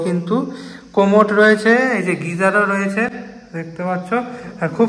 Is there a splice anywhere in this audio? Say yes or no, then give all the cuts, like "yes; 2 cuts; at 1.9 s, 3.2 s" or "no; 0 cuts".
no; 0 cuts